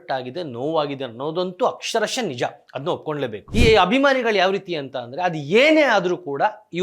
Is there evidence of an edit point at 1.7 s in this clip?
no; 1 cut; at 3.4 s

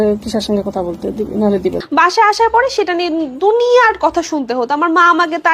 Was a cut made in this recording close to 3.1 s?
no; 1 cut; at 1.8 s

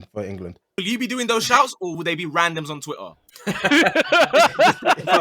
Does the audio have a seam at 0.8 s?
yes; 2 cuts; at 0.8 s, 2.0 s

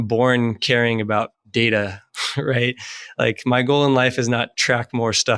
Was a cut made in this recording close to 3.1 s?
no; 0 cuts

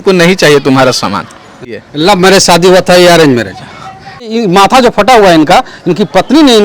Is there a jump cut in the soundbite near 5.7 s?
no; 2 cuts; at 1.8 s, 4.3 s

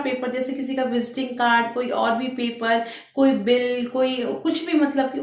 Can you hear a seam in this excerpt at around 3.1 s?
no; 0 cuts

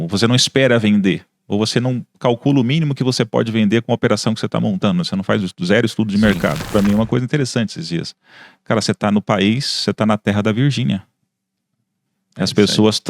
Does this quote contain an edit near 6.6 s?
yes; 1 cut; at 6.6 s

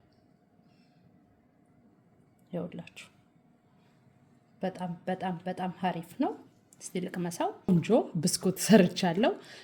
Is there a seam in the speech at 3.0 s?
no; 1 cut; at 7.7 s

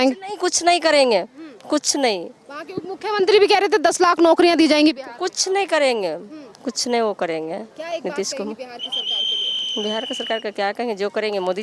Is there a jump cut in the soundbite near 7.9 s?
no; 0 cuts

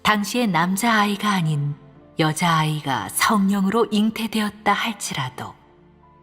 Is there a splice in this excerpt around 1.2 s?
yes; 1 cut; at 1.2 s

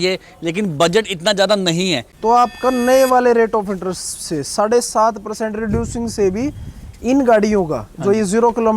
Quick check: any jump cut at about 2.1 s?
yes; 1 cut; at 2.1 s

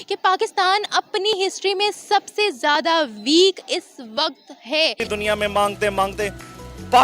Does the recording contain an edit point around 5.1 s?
yes; 1 cut; at 5.1 s

